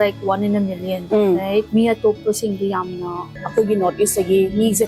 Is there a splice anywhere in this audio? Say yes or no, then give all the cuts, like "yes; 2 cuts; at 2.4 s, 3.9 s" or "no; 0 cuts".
yes; 3 cuts; at 1.0 s, 1.7 s, 3.4 s